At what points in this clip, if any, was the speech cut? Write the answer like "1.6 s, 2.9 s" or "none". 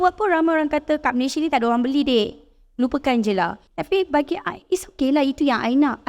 3.6 s